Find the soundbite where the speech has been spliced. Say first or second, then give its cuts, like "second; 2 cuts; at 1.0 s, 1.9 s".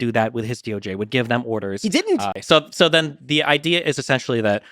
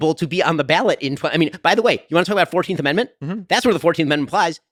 first; 1 cut; at 2.4 s